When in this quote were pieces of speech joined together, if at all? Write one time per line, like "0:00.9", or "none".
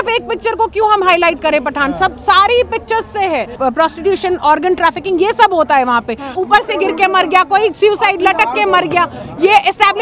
0:03.5
0:06.3